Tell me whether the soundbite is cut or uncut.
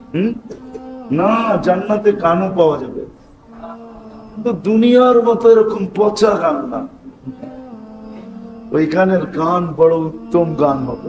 uncut